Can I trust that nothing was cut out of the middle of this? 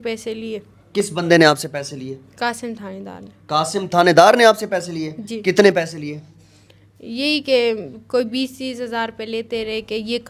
yes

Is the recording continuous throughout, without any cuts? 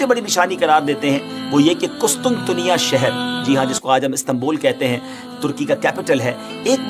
yes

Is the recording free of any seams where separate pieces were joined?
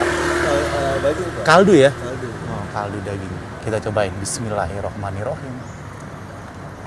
no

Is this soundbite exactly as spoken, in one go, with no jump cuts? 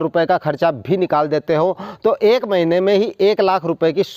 yes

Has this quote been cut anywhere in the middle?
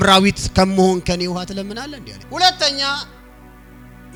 no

